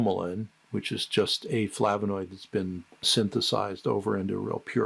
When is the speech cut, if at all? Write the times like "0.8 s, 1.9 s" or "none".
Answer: 3.0 s